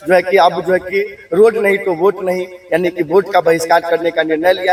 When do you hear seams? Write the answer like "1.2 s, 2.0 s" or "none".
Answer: none